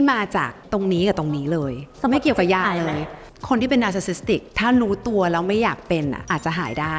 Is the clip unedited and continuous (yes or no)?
yes